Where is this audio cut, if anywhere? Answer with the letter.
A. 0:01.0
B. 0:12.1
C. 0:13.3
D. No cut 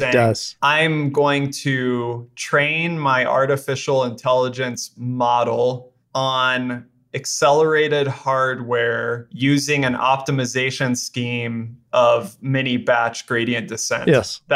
D